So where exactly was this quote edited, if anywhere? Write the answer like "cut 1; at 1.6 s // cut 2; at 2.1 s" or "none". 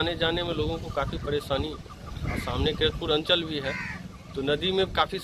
none